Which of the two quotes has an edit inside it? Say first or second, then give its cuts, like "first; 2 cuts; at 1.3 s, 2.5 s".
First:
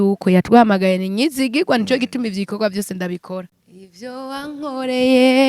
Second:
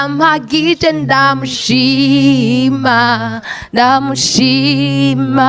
first; 1 cut; at 3.6 s